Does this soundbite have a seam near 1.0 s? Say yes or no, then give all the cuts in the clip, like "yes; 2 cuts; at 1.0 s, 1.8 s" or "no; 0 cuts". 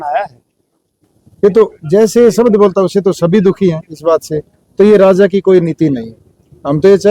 yes; 1 cut; at 1.0 s